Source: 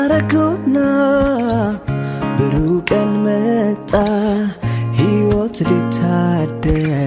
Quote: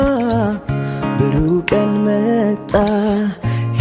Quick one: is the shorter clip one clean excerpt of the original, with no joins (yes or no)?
yes